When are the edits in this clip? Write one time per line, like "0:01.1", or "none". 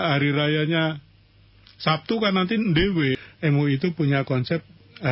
0:03.2